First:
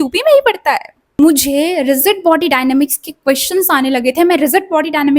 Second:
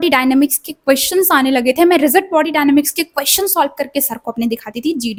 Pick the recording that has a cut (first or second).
first